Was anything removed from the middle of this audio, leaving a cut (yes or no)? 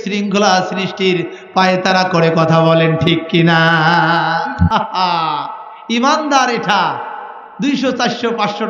yes